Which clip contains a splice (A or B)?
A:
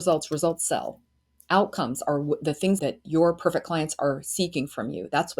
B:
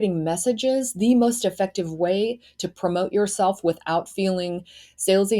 A